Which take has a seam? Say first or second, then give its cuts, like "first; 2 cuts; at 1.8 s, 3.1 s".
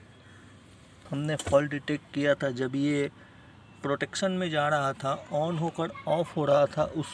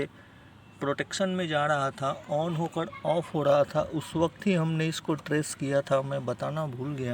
first; 1 cut; at 1.0 s